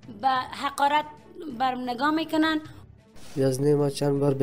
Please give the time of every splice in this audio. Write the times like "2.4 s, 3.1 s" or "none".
3.1 s